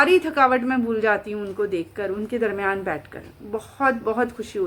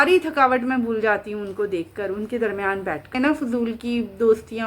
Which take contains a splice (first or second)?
second